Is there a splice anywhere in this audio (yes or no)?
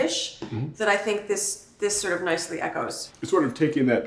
yes